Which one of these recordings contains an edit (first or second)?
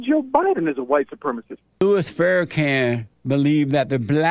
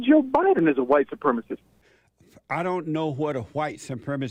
first